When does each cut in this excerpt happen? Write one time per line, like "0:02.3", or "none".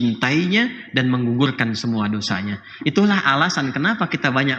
none

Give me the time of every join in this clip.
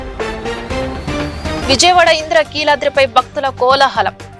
0:01.6

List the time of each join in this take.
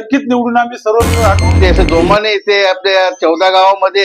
0:01.6

